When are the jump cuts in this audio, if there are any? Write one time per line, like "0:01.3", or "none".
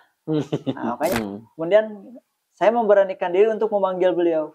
0:01.1